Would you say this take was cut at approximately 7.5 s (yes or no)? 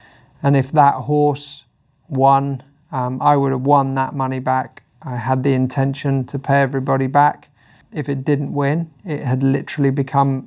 yes